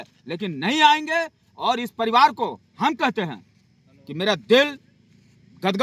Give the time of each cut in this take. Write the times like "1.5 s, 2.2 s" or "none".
none